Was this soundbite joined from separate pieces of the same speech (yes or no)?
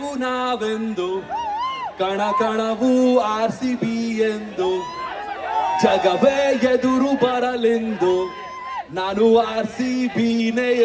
no